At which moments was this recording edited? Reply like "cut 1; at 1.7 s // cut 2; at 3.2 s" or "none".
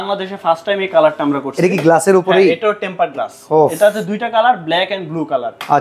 none